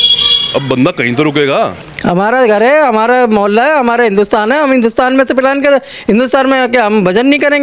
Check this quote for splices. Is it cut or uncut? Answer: cut